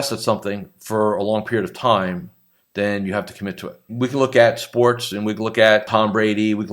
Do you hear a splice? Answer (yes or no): yes